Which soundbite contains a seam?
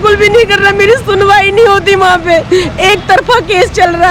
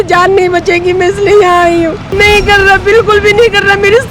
second; 1 cut; at 2.0 s

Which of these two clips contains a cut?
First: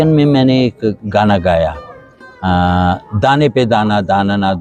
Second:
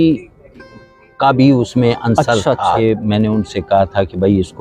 second; 1 cut; at 2.8 s

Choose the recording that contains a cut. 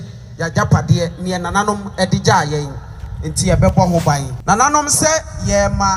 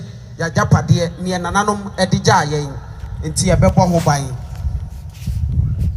first; 1 cut; at 4.3 s

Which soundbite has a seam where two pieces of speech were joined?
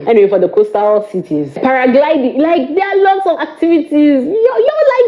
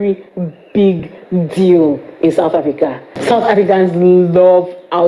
second; 1 cut; at 3.1 s

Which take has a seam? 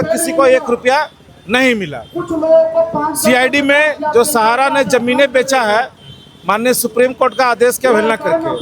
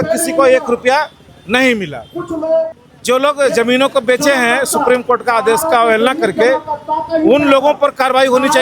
second; 1 cut; at 2.7 s

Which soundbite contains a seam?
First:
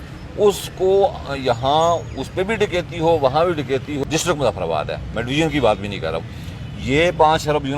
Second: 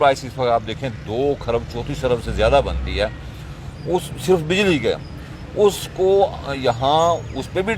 first; 1 cut; at 4.0 s

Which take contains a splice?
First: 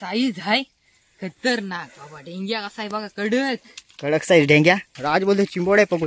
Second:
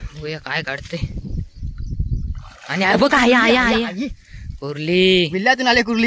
first; 1 cut; at 4.9 s

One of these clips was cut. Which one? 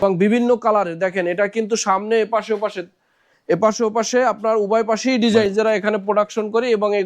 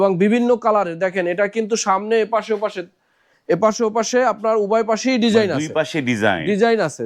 first; 1 cut; at 5.5 s

